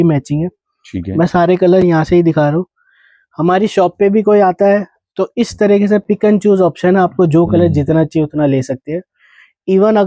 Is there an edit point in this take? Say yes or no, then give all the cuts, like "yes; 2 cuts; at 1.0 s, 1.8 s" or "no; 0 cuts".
no; 0 cuts